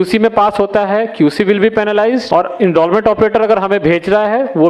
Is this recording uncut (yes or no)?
no